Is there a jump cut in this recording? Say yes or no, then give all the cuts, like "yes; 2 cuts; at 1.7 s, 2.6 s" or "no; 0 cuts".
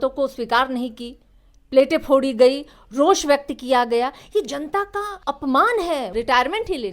yes; 2 cuts; at 5.1 s, 6.1 s